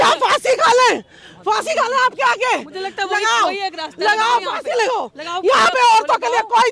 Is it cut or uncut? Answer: uncut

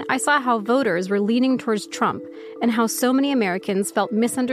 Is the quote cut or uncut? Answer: uncut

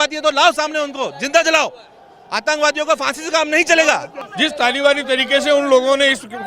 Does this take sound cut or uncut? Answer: cut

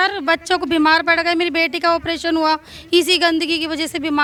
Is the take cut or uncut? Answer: uncut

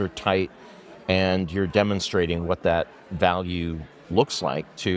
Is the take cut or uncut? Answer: uncut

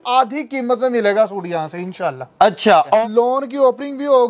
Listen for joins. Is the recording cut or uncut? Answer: cut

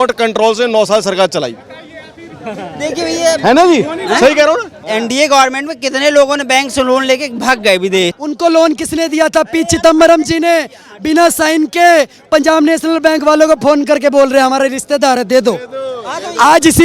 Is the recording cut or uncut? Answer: cut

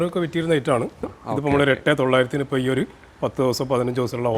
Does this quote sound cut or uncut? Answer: cut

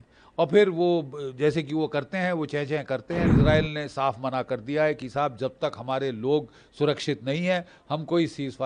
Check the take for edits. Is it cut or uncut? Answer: cut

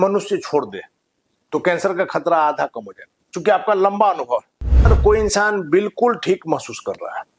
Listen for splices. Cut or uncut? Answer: cut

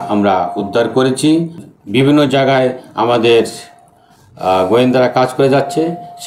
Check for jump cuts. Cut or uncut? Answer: cut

